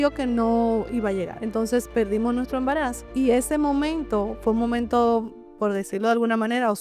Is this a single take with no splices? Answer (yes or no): no